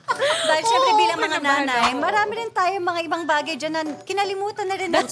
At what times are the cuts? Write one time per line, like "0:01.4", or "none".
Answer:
none